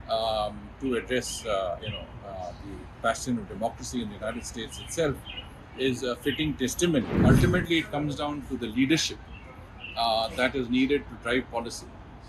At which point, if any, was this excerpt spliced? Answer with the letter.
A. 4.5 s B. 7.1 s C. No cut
B